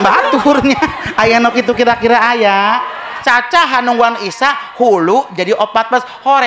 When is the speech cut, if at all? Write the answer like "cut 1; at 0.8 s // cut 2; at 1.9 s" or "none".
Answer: cut 1; at 3.2 s